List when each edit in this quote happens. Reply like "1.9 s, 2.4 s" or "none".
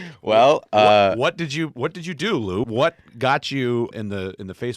2.6 s, 3.9 s